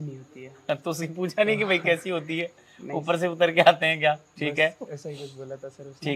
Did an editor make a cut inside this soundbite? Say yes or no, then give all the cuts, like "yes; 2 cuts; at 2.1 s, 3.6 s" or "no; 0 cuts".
no; 0 cuts